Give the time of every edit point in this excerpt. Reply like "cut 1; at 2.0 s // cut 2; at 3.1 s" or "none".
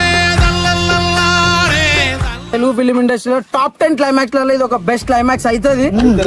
cut 1; at 2.5 s